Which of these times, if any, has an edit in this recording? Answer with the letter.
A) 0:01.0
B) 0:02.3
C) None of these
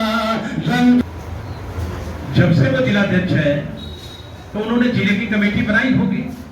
A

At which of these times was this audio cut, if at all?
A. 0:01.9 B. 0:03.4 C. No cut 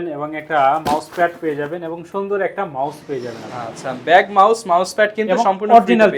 C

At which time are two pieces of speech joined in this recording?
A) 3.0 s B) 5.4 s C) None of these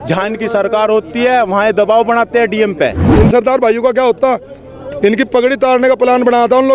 A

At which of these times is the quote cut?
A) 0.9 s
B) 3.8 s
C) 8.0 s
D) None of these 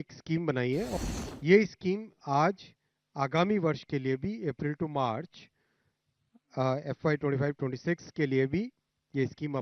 A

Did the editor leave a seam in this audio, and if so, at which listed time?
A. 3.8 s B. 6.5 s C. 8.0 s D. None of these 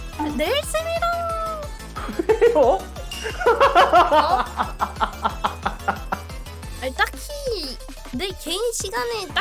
B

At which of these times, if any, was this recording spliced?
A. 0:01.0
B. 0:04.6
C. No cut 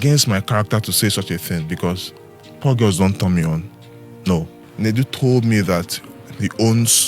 B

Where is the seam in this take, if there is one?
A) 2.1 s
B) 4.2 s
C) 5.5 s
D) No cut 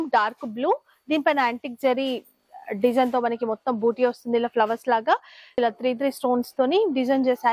C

